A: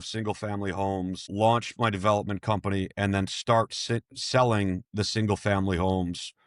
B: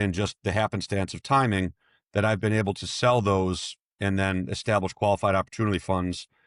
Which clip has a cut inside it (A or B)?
A